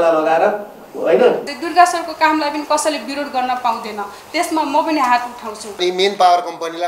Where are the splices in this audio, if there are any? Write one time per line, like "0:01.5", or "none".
0:01.5
0:05.7